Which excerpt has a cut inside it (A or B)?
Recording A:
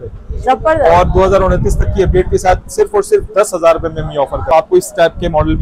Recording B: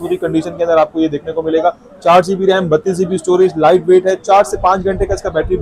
A